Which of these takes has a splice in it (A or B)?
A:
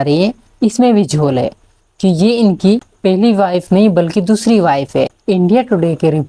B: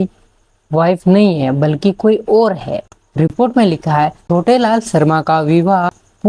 B